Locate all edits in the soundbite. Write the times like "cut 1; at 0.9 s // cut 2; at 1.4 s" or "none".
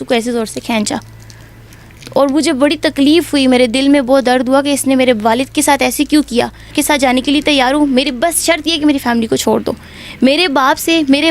cut 1; at 6.7 s